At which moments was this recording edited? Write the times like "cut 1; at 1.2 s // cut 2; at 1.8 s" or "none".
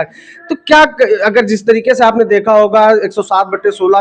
none